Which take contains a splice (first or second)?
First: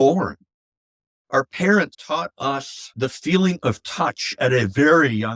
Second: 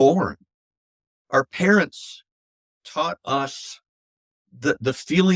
first